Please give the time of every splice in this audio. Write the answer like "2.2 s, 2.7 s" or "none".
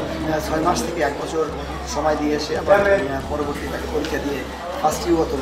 none